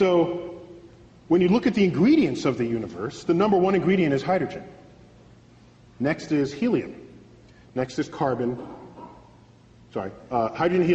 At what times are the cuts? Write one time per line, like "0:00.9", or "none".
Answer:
0:10.0

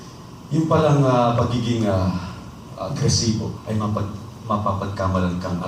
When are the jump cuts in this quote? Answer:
0:03.6

